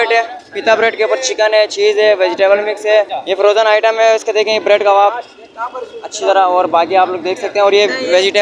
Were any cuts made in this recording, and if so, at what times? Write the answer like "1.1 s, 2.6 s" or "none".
3.2 s